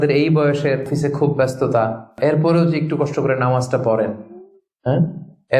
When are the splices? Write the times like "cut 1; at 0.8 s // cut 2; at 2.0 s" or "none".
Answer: cut 1; at 0.9 s // cut 2; at 2.2 s